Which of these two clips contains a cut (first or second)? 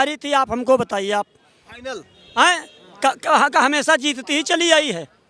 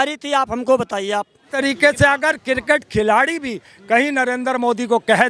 second